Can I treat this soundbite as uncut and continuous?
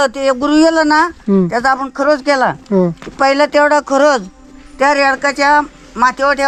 yes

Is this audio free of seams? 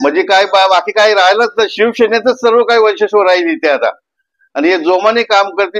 yes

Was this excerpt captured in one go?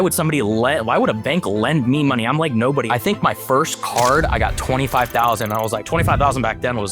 no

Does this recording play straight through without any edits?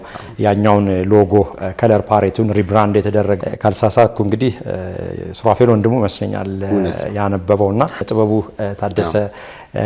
no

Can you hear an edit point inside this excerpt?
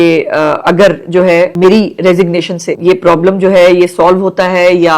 yes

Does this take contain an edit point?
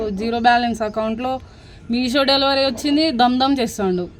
no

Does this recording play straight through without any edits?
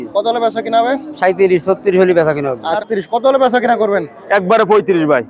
no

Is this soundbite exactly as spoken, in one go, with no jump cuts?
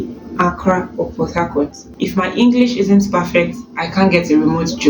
no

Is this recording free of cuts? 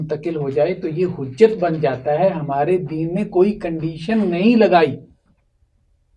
yes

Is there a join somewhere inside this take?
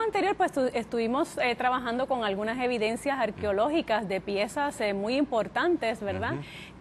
no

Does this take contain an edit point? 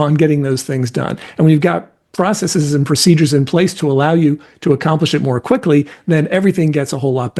no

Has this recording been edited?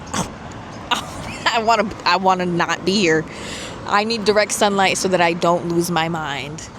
no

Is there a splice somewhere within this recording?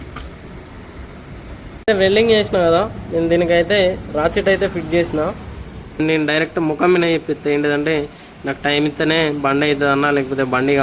yes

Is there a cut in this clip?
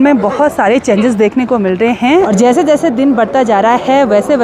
yes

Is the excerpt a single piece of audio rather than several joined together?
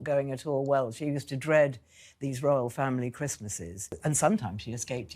no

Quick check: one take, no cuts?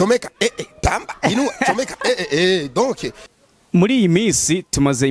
no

